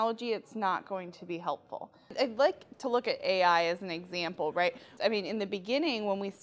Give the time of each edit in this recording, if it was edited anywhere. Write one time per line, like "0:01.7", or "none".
0:02.1
0:04.9